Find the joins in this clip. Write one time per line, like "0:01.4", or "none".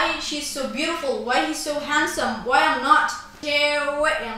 0:03.3